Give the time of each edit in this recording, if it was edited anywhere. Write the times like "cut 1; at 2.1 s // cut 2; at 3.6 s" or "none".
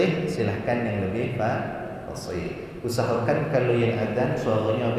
none